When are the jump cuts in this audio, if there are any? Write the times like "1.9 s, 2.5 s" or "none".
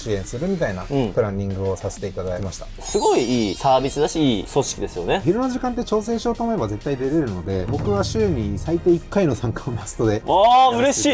2.8 s, 5.2 s